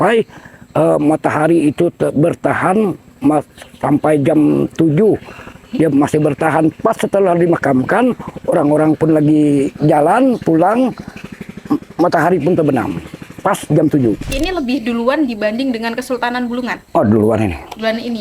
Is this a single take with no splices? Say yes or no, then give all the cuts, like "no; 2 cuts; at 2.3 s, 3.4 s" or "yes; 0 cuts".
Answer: no; 1 cut; at 14.3 s